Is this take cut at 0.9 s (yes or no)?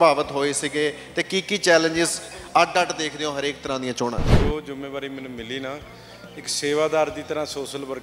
no